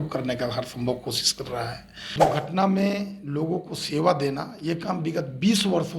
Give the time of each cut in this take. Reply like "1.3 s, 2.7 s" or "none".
2.2 s